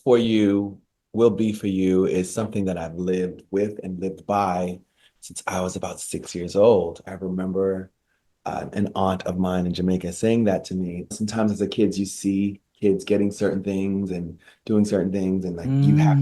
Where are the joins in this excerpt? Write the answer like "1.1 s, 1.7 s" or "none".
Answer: 7.1 s, 11.1 s